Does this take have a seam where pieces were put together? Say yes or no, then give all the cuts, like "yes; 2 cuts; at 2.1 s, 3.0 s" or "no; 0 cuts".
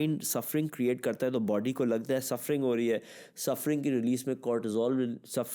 no; 0 cuts